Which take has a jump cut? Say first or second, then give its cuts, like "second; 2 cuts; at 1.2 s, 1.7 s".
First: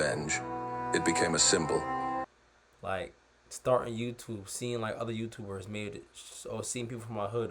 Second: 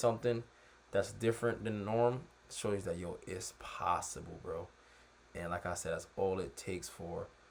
first; 1 cut; at 2.3 s